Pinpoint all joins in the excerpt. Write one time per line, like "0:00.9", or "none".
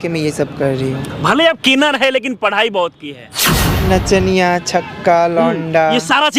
0:03.6